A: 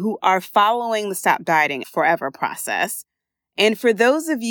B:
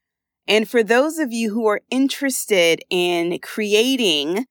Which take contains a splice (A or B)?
A